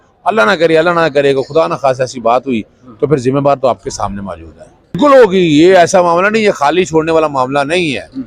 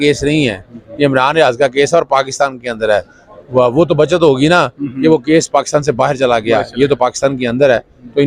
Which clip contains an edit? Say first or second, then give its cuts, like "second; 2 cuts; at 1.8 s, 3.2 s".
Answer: first; 1 cut; at 5.0 s